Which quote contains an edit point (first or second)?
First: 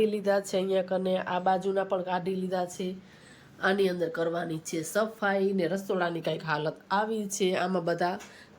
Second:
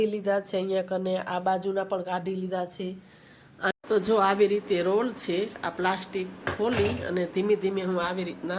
second